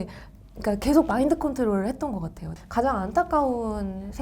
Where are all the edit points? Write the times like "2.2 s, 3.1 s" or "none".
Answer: 2.5 s

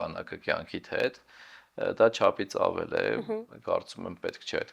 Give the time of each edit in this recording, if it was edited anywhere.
none

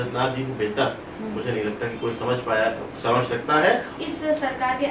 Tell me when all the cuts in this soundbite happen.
3.9 s

